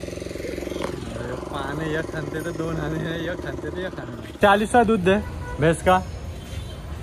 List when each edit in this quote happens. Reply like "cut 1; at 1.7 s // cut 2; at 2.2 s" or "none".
cut 1; at 4.3 s